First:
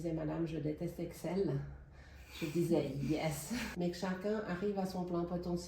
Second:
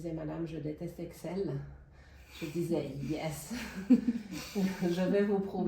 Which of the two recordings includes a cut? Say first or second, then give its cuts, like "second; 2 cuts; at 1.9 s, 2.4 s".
first; 1 cut; at 3.7 s